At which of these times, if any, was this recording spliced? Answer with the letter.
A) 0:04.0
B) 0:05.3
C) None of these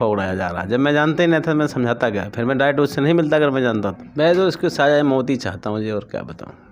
A